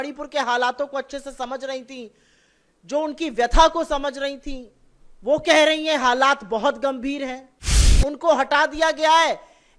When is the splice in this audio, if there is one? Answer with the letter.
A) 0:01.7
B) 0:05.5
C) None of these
C